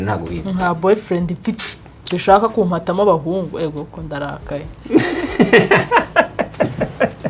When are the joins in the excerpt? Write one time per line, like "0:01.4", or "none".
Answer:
none